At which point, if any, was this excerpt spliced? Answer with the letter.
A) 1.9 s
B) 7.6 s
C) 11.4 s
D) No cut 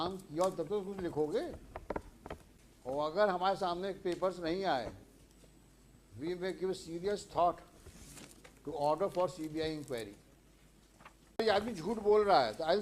C